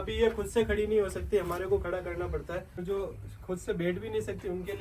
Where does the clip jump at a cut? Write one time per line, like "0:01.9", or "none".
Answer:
0:02.8